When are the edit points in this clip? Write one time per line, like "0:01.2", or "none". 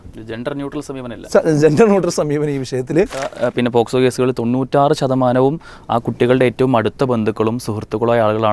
0:03.4